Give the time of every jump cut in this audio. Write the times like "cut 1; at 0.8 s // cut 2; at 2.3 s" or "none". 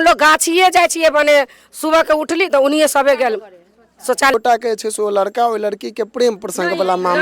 cut 1; at 4.3 s